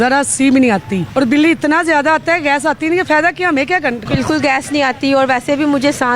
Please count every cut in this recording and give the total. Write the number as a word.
two